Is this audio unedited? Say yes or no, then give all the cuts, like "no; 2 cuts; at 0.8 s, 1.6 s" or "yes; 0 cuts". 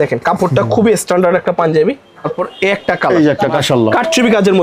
no; 2 cuts; at 2.4 s, 3.6 s